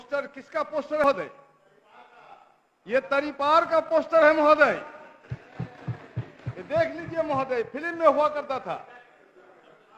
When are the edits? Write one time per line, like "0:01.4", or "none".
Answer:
0:01.0